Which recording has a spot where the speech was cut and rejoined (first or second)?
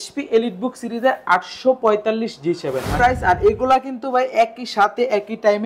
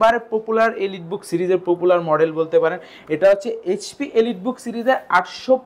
first